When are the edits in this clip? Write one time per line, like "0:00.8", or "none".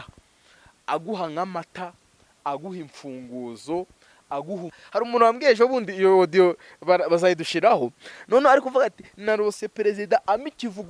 0:04.8